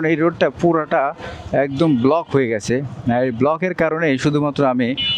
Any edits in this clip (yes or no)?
no